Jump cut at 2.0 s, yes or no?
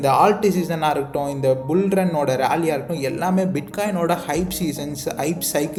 no